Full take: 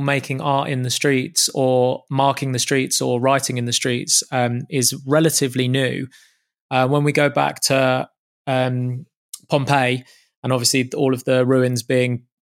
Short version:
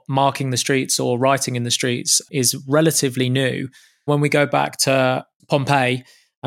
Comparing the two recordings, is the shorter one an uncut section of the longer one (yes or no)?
no